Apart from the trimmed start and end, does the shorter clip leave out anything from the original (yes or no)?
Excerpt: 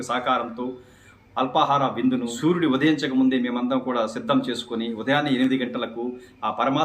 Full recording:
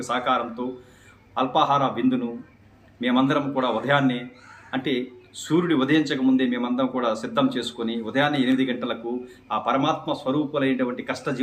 yes